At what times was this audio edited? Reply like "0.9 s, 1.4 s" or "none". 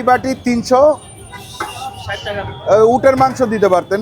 none